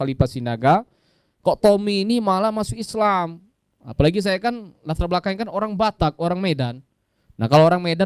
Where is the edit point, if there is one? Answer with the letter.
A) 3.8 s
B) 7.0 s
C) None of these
C